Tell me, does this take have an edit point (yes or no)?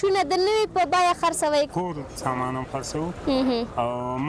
yes